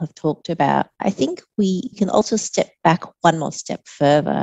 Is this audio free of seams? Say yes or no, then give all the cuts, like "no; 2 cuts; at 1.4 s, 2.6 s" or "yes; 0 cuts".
no; 2 cuts; at 0.9 s, 2.2 s